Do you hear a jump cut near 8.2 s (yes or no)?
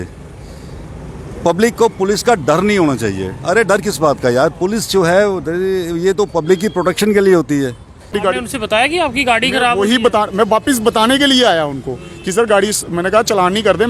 yes